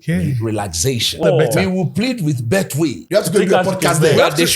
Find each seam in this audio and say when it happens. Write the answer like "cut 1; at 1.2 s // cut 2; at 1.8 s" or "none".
cut 1; at 1.2 s // cut 2; at 3.0 s